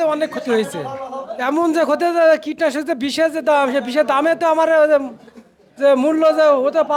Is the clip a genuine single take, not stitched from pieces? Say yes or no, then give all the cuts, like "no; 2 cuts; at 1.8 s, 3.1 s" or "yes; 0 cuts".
yes; 0 cuts